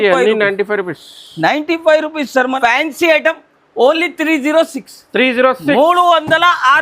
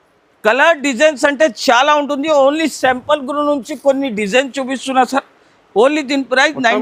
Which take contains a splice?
first; 1 cut; at 2.5 s

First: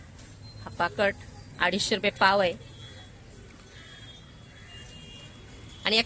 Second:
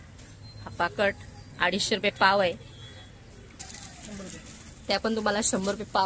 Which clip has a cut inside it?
second; 1 cut; at 3.6 s

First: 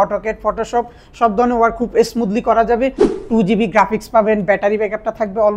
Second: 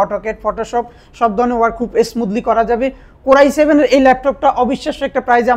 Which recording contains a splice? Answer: first; 1 cut; at 3.1 s

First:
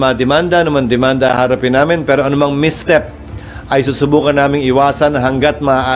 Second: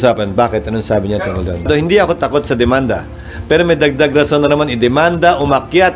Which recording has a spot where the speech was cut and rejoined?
second; 1 cut; at 1.7 s

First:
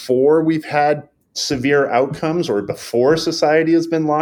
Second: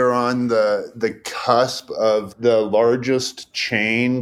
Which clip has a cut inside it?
second; 1 cut; at 2.3 s

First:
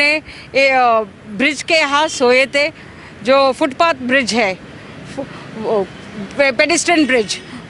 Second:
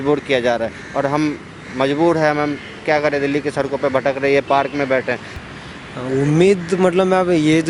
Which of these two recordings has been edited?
second; 1 cut; at 5.3 s

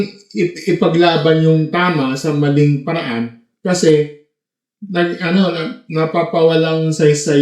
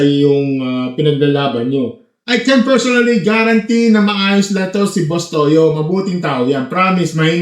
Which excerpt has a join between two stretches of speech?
second; 1 cut; at 2.1 s

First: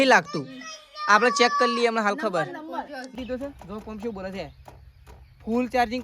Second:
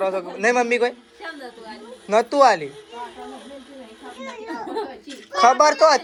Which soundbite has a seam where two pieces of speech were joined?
first; 1 cut; at 3.2 s

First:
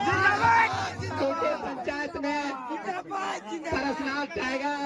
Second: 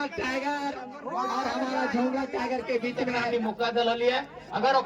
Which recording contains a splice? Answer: second; 1 cut; at 3.2 s

